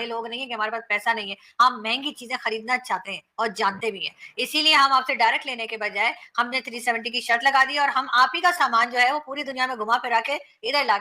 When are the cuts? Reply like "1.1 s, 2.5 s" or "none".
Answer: none